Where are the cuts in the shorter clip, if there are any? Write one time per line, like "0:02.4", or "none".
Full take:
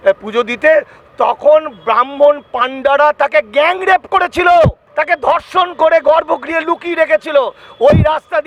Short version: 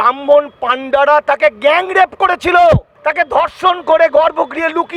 none

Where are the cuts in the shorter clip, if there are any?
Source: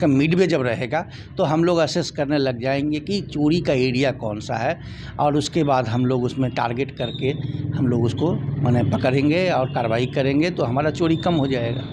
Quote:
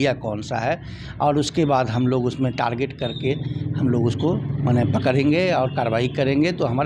none

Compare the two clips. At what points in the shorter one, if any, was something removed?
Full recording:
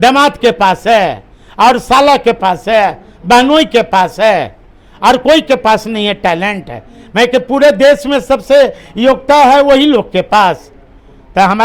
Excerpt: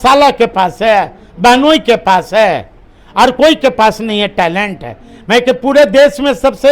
none

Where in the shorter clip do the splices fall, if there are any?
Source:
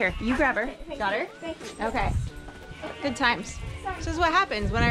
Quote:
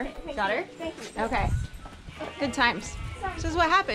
none

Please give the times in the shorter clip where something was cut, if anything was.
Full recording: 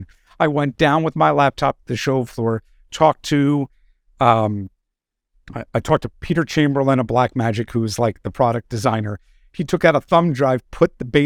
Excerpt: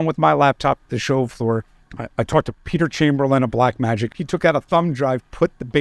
0:01.8
0:04.1

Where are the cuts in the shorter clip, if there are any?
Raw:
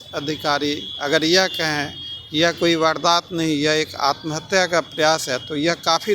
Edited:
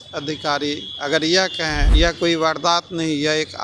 0:01.8

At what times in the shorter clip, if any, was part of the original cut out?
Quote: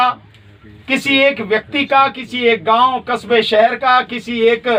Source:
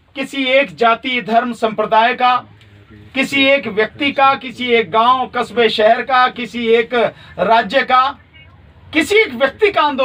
none

